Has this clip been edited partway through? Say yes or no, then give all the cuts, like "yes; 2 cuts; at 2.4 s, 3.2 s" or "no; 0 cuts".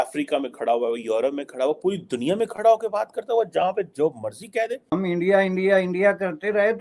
yes; 1 cut; at 4.9 s